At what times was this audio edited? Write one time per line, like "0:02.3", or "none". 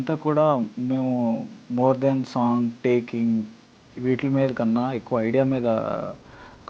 0:01.6